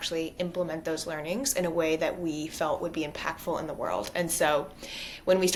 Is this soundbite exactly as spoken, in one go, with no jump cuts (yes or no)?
yes